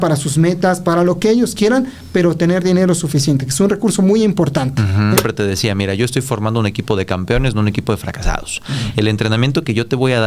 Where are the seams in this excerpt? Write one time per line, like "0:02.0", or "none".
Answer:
0:05.2